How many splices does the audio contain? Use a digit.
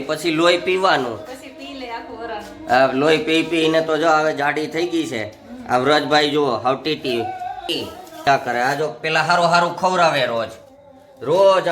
1